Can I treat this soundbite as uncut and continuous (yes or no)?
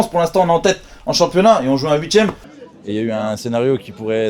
no